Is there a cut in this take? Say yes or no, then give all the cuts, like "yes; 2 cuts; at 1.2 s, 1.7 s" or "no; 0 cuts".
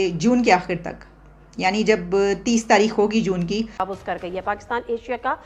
yes; 1 cut; at 3.8 s